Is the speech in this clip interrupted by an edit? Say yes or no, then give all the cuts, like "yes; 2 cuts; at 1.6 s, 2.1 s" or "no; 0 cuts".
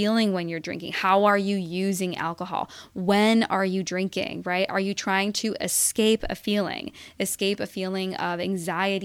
no; 0 cuts